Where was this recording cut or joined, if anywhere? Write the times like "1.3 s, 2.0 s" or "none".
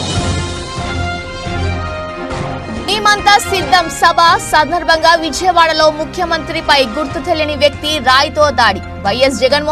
none

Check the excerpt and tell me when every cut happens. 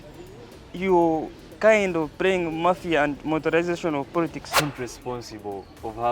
4.5 s

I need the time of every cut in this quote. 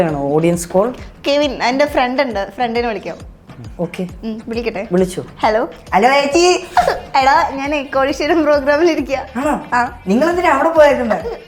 none

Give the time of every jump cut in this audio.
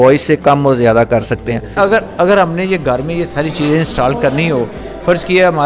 1.7 s

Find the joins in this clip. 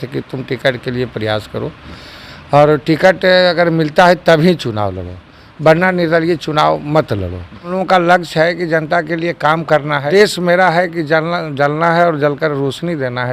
7.8 s, 10.0 s

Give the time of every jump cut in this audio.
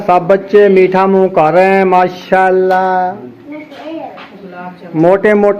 3.2 s

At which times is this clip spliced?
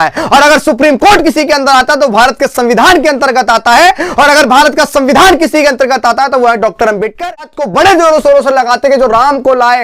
7.5 s

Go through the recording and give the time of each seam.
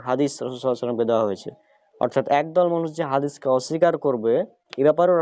none

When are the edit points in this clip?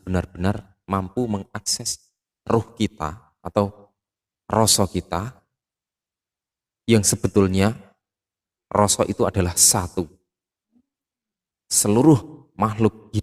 none

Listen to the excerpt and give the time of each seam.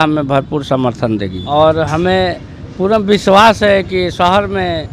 1.4 s

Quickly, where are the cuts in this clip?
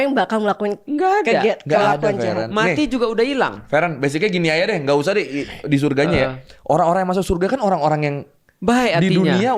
none

